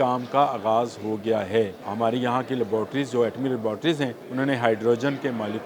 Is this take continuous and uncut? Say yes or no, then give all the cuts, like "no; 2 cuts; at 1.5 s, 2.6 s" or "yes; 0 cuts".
no; 2 cuts; at 1.8 s, 4.2 s